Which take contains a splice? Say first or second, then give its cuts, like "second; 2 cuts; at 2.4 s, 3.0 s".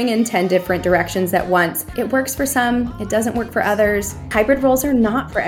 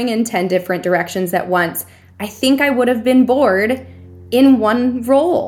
first; 2 cuts; at 1.9 s, 4.3 s